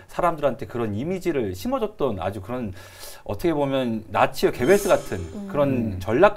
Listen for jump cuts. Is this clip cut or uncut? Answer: uncut